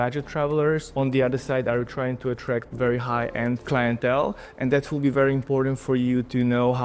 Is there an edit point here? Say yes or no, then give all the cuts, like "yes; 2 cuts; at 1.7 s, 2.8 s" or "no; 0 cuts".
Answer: no; 0 cuts